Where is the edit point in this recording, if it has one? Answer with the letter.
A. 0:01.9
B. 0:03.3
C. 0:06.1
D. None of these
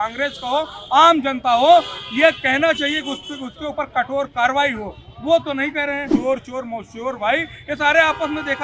C